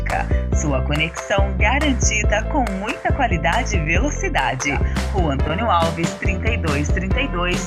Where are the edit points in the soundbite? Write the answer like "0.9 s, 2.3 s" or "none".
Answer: none